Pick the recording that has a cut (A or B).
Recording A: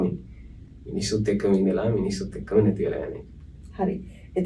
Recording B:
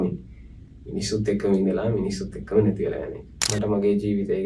B